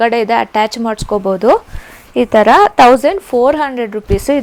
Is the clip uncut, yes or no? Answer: yes